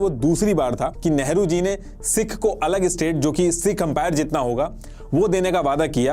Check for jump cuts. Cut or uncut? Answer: cut